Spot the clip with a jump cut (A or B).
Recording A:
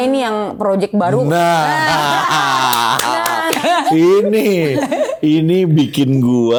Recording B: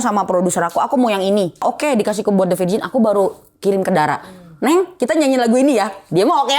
B